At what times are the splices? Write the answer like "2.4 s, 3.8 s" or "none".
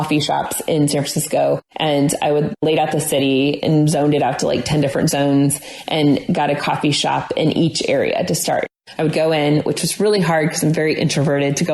8.7 s